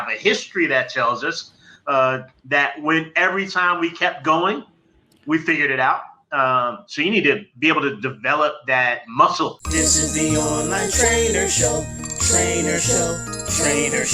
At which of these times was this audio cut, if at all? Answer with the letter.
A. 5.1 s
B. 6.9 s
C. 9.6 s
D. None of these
C